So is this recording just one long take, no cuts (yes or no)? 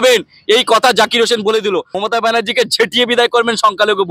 no